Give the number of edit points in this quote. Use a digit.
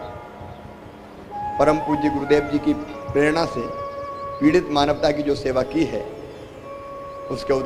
0